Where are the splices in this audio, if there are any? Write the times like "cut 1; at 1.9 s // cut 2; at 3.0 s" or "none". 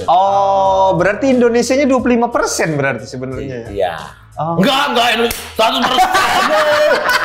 none